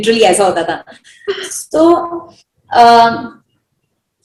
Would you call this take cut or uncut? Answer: uncut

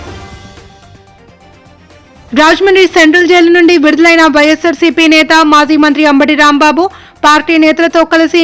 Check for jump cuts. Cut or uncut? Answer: cut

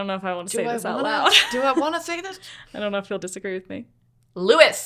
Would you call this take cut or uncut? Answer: uncut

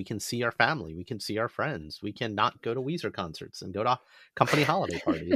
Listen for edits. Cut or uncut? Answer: uncut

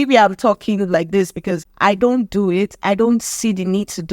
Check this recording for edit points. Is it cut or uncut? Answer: cut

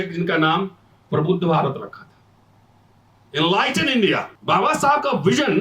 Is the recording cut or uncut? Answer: cut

